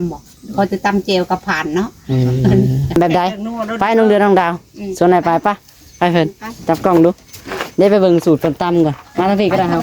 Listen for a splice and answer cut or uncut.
cut